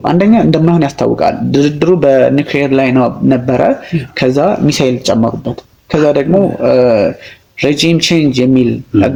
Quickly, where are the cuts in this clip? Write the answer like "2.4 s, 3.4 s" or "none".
none